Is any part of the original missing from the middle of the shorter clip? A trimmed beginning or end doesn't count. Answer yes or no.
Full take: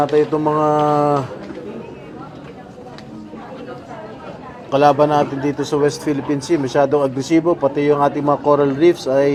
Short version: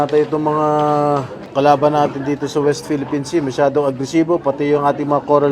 yes